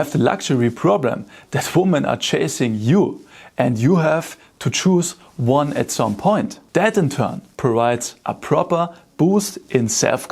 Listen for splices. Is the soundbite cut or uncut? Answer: cut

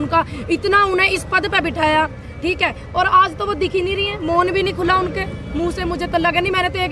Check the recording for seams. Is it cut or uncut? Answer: uncut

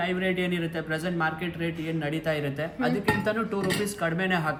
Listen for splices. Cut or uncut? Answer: uncut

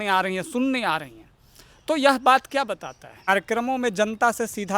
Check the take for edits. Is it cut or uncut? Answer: cut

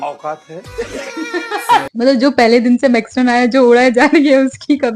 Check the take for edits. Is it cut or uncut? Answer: cut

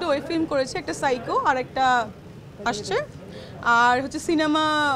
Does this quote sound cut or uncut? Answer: uncut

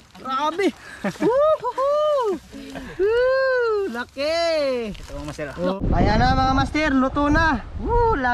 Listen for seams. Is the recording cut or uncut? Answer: cut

